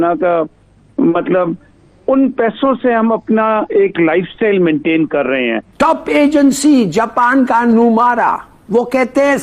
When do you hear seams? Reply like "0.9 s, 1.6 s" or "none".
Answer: 5.6 s

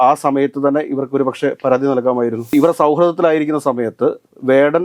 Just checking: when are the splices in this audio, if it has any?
2.5 s

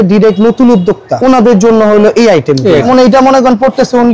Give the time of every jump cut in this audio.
1.1 s, 2.9 s

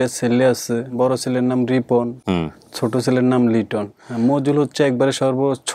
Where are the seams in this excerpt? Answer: 1.0 s, 4.0 s

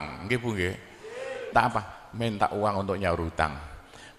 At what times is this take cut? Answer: 1.5 s

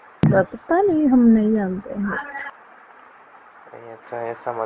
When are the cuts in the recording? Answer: none

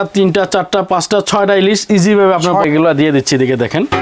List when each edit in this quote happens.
2.7 s

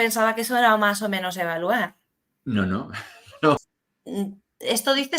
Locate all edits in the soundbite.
3.6 s

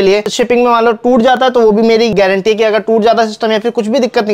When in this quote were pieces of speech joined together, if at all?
none

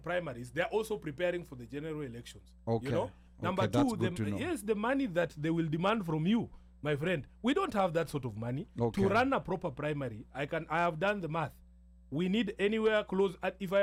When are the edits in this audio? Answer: none

